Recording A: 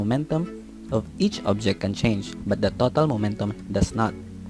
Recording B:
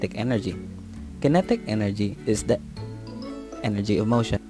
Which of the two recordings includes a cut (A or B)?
B